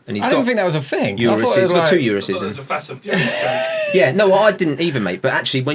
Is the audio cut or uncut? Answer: uncut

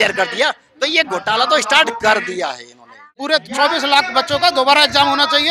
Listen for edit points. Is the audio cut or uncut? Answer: cut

